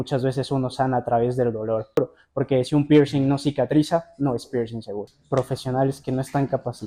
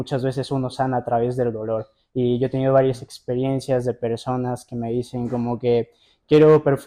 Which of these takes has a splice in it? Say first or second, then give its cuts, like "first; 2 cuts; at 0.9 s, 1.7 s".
first; 2 cuts; at 2.0 s, 5.1 s